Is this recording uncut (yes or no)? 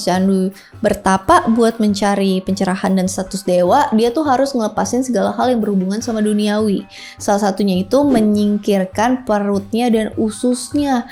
yes